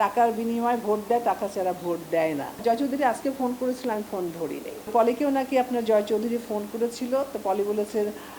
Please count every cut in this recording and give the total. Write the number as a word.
two